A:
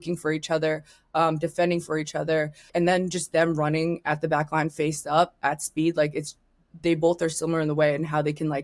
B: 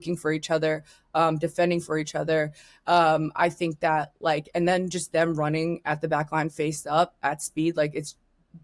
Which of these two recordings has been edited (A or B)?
A